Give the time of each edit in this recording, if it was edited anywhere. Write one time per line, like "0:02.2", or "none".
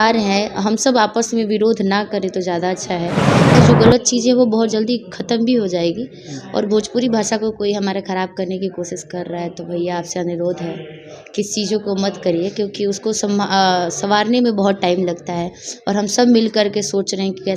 0:03.6

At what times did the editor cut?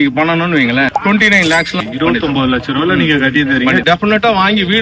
0:03.8

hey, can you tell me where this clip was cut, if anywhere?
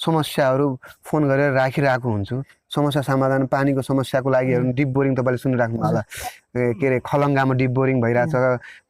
0:02.6

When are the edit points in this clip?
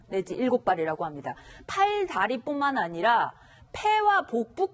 none

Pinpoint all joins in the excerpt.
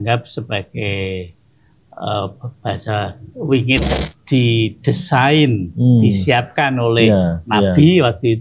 0:04.0

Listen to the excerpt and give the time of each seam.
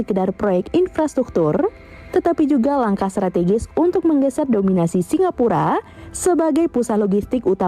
none

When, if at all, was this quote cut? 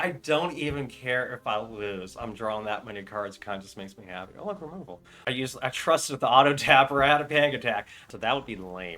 0:05.3
0:08.0

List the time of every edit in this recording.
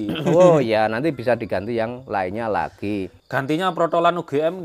0:03.2

